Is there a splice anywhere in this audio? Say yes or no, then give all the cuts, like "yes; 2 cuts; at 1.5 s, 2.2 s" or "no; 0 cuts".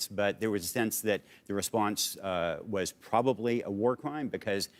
no; 0 cuts